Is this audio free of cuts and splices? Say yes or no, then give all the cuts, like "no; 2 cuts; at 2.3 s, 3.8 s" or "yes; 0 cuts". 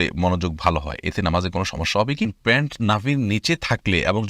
no; 1 cut; at 2.3 s